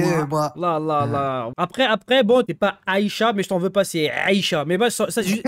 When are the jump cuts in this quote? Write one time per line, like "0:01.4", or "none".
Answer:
0:01.5
0:02.5